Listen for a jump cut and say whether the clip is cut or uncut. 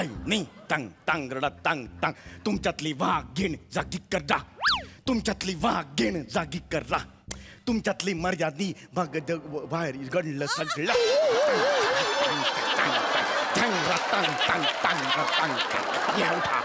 uncut